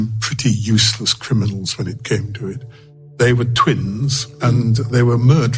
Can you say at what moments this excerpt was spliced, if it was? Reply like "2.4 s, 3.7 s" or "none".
2.9 s, 4.5 s